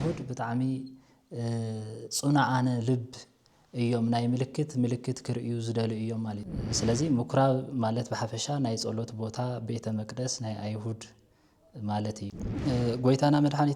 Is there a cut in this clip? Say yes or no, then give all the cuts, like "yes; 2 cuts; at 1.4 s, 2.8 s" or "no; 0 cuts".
yes; 2 cuts; at 6.5 s, 12.4 s